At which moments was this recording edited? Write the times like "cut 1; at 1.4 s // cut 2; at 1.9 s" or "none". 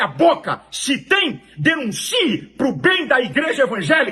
cut 1; at 2.0 s